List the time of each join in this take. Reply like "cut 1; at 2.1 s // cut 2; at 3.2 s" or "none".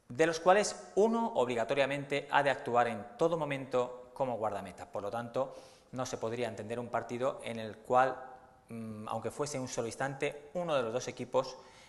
none